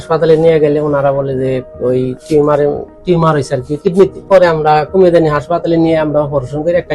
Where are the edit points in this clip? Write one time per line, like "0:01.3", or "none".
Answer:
0:04.3